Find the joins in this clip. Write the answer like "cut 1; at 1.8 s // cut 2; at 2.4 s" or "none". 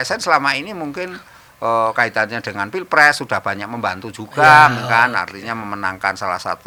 none